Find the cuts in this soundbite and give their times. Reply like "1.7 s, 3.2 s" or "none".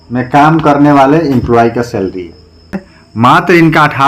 2.9 s